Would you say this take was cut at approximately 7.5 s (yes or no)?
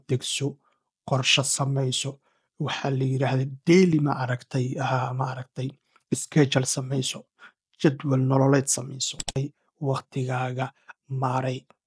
no